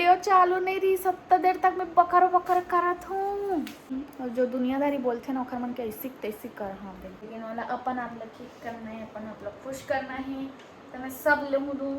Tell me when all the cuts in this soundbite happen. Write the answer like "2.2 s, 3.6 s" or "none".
3.9 s, 7.2 s